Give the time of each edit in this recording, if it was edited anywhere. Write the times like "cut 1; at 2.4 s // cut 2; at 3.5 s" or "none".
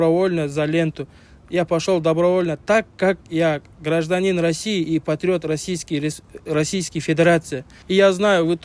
none